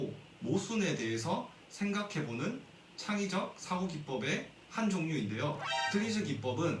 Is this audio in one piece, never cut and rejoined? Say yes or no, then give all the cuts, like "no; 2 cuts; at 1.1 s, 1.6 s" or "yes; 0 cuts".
no; 1 cut; at 5.7 s